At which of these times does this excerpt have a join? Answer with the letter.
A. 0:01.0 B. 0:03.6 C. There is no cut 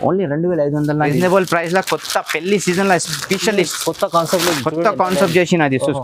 A